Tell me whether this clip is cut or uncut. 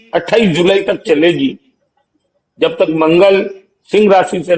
uncut